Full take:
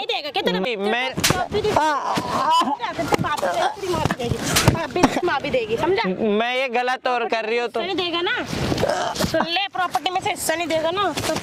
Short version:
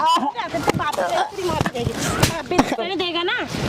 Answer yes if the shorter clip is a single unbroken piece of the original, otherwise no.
no